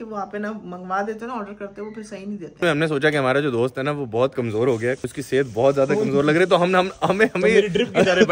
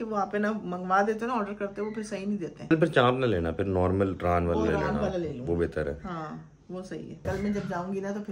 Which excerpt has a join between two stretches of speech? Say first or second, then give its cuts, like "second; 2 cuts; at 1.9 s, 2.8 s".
first; 2 cuts; at 2.6 s, 5.1 s